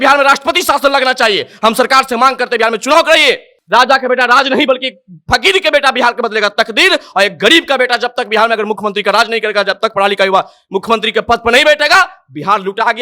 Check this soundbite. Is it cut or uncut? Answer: cut